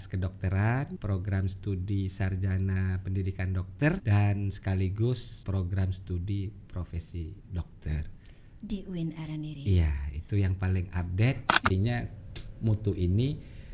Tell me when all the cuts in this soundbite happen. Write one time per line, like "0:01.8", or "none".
0:01.0
0:04.0
0:05.3
0:11.7